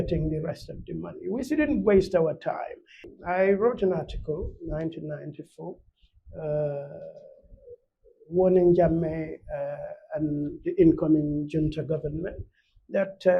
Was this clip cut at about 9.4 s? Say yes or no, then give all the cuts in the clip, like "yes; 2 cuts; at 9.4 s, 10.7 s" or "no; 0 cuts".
no; 1 cut; at 3.1 s